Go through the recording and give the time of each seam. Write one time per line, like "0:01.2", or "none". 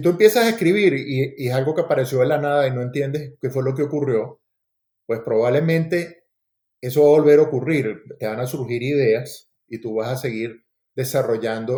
none